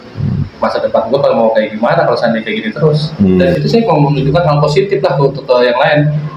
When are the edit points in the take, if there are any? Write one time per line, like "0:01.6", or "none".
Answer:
0:03.4

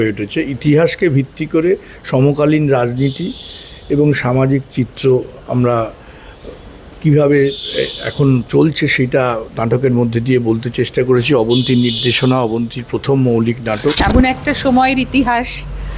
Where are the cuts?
0:14.0

